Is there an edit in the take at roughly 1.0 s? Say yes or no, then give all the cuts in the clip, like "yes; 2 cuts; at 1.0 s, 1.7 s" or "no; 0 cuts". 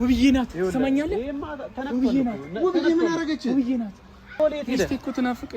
no; 1 cut; at 4.3 s